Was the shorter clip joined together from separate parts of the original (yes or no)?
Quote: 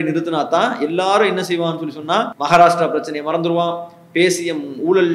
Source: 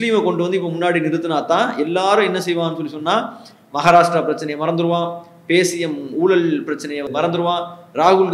yes